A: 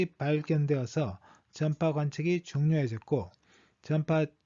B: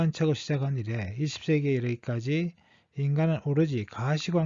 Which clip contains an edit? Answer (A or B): A